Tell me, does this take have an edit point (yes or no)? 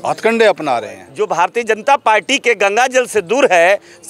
yes